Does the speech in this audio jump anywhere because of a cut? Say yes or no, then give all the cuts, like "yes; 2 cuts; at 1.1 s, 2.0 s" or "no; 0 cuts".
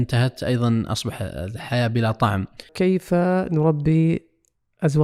yes; 1 cut; at 2.7 s